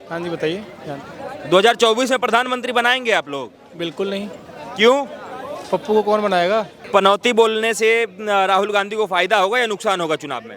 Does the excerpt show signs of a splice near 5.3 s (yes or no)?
no